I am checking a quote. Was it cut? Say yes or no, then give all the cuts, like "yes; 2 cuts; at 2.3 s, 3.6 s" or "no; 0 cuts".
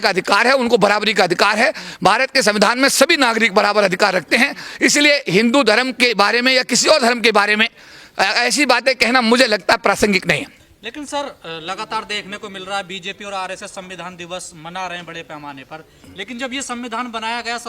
no; 0 cuts